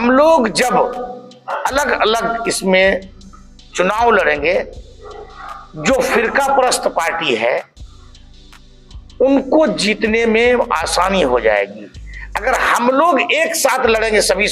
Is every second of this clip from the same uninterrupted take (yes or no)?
yes